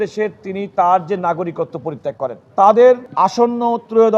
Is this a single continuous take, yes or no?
no